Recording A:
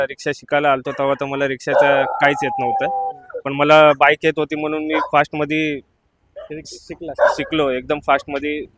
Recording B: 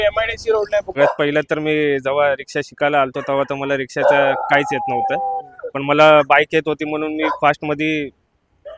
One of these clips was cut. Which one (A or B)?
B